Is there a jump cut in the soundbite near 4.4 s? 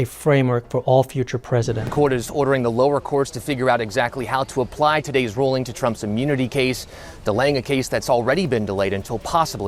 no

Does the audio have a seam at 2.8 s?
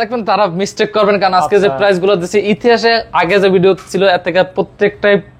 no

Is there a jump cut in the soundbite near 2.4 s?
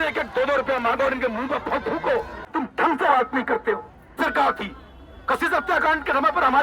yes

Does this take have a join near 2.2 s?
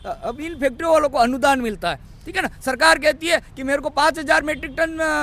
no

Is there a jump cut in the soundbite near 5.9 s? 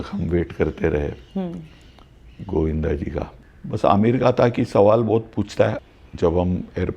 yes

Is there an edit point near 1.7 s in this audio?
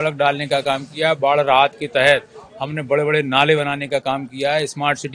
no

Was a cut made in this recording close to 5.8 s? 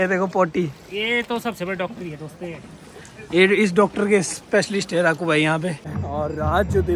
yes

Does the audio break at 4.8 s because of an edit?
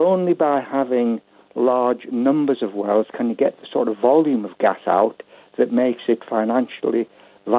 no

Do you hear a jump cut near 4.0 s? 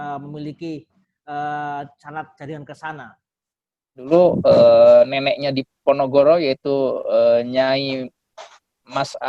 yes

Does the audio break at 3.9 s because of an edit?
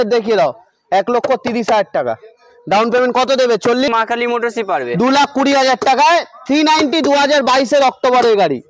yes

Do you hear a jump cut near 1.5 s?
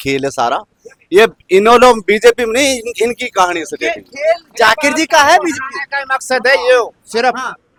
no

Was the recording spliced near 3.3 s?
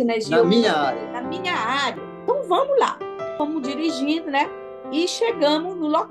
yes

